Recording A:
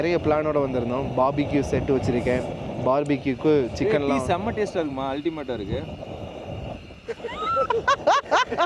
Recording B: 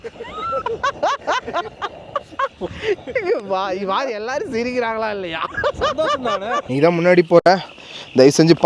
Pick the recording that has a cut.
B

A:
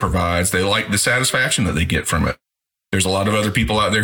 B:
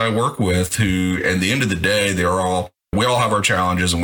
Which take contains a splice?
A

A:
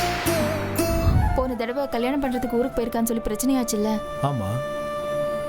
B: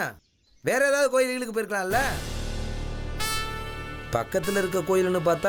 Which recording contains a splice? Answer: A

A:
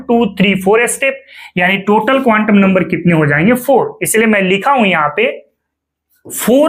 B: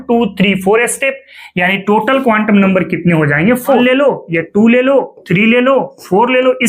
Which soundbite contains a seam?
B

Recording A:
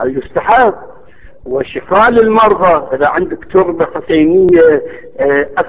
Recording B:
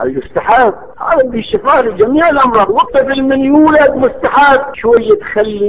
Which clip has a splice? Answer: B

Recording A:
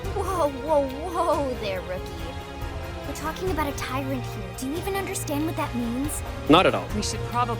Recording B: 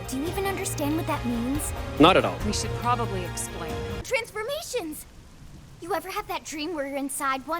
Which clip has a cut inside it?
B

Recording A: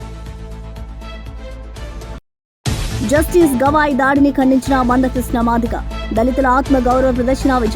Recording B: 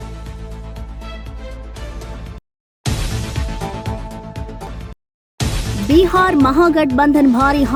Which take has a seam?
A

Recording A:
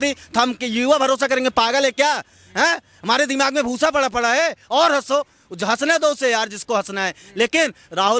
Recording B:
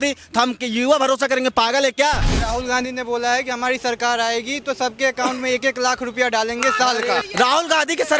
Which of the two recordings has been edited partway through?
B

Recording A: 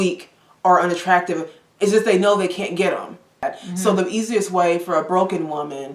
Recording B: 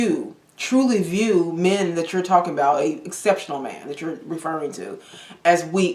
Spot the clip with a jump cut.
A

